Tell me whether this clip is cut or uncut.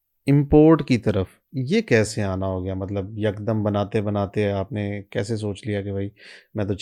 uncut